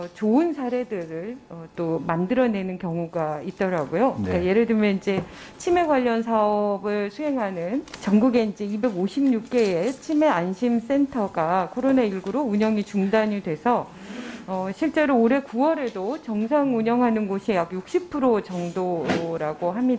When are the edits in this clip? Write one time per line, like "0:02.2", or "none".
none